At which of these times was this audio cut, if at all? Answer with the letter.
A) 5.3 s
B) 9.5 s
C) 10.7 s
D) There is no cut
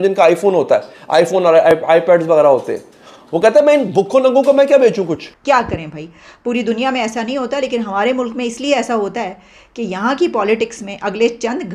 A